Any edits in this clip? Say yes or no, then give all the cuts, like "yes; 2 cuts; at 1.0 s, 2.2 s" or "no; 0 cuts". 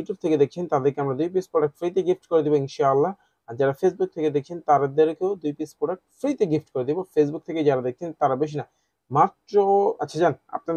no; 0 cuts